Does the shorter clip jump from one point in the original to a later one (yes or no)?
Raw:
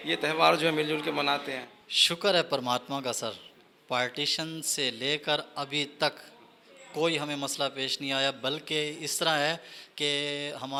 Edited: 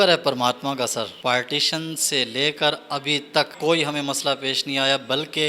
yes